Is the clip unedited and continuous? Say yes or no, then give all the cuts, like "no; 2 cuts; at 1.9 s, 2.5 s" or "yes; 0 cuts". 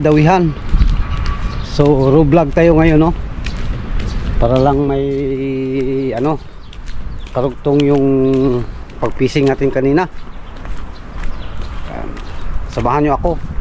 yes; 0 cuts